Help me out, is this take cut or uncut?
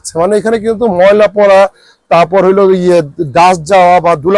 uncut